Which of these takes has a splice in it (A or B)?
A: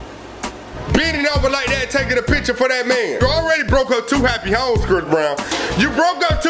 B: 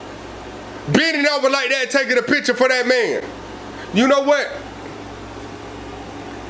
A